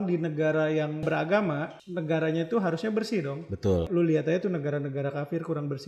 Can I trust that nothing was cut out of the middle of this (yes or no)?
no